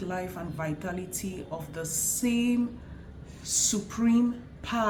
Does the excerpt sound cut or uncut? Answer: uncut